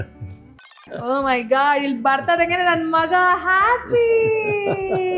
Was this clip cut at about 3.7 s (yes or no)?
no